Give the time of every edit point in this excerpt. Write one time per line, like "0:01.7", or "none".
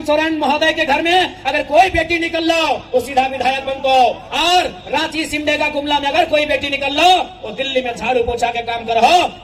none